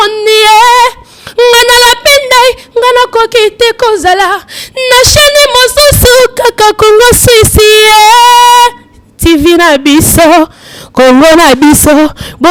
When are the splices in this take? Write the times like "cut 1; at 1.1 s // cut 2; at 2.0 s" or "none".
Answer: none